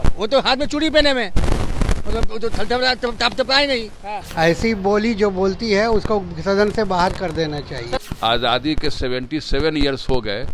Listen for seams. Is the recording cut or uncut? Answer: cut